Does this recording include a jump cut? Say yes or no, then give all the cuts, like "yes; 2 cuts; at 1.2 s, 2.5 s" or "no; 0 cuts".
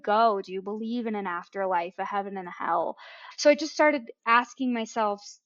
no; 0 cuts